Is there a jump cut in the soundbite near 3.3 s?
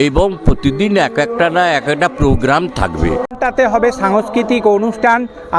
yes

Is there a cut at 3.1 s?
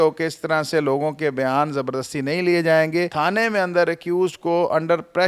yes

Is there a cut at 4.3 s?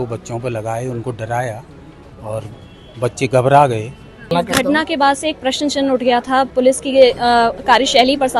yes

